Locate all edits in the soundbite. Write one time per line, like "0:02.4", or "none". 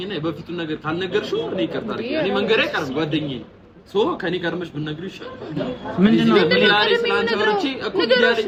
none